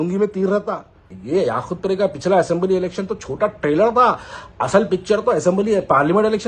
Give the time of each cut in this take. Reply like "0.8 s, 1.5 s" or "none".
1.1 s